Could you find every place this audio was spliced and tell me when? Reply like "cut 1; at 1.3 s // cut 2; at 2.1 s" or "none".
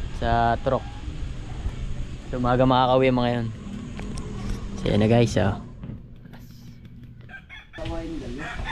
cut 1; at 7.8 s